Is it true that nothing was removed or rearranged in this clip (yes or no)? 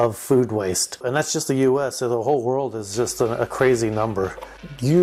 no